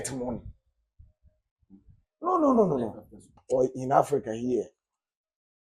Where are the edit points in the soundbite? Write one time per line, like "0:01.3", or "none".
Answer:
0:03.3